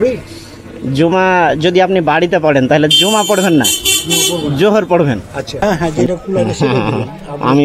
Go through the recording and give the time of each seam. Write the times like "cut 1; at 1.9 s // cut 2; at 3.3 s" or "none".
cut 1; at 5.5 s